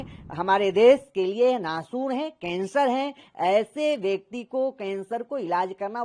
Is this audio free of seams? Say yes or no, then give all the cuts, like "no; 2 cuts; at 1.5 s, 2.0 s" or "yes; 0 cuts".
yes; 0 cuts